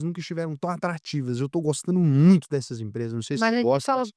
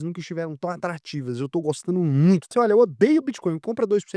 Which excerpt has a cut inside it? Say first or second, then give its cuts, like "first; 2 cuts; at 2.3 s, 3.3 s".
second; 1 cut; at 2.5 s